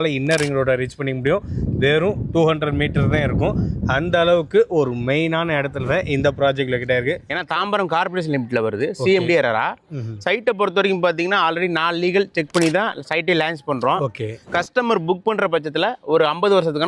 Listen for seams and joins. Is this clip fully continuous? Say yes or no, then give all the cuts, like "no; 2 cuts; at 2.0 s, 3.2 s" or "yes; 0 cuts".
no; 1 cut; at 7.3 s